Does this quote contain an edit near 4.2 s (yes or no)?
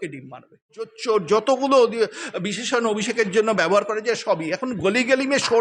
no